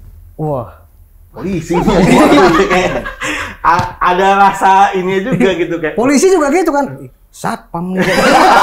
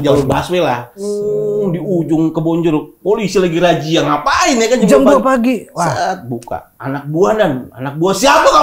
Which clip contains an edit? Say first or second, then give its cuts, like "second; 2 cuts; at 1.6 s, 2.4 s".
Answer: second; 1 cut; at 1.0 s